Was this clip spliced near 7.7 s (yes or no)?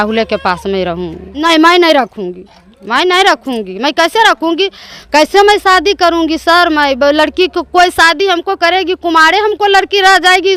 no